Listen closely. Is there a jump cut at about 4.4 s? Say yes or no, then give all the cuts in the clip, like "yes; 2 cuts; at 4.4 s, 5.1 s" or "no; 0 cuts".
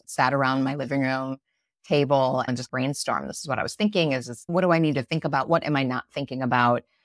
yes; 2 cuts; at 2.5 s, 4.4 s